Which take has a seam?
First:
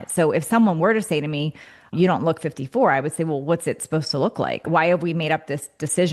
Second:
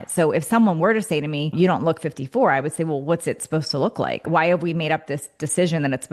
second; 1 cut; at 1.4 s

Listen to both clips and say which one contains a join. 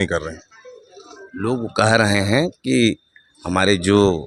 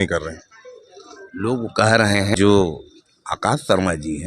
second; 1 cut; at 2.3 s

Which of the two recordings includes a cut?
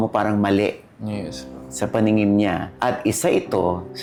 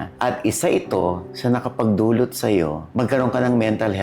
second; 1 cut; at 2.9 s

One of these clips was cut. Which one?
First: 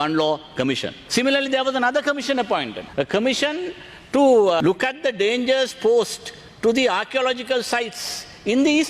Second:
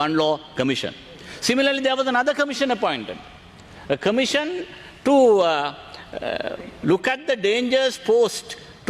first; 3 cuts; at 0.9 s, 2.8 s, 4.6 s

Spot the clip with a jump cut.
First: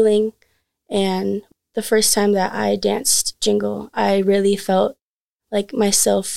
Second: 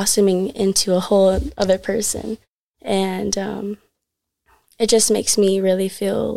first; 1 cut; at 1.4 s

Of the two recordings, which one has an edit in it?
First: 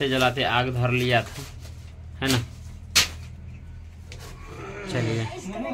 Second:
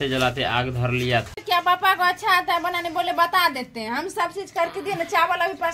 second; 1 cut; at 1.4 s

